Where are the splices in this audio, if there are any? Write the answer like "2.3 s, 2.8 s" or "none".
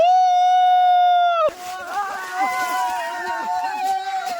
1.6 s

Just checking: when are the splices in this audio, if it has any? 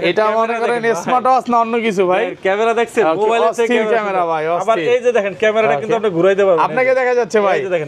none

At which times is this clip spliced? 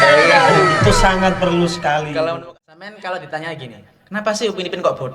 2.4 s

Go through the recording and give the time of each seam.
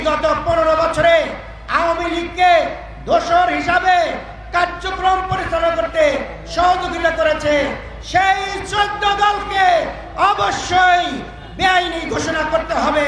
none

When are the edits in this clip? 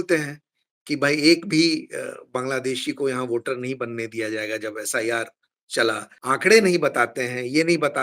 6.1 s

